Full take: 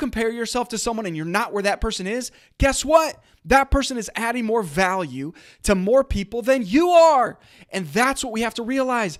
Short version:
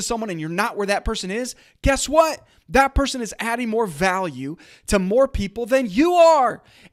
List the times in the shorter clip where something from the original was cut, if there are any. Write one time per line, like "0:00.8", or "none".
none